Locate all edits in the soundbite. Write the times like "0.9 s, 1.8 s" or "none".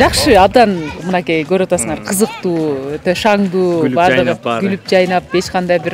none